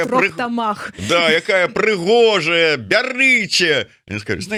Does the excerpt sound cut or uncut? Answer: uncut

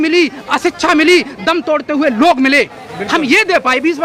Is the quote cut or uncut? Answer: cut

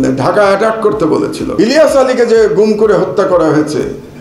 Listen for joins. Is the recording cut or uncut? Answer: cut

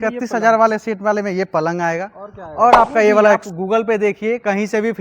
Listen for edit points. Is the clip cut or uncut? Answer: cut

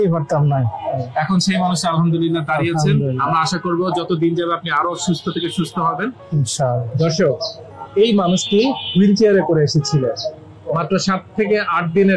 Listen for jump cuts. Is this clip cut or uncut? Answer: cut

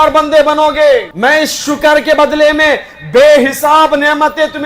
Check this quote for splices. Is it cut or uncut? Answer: cut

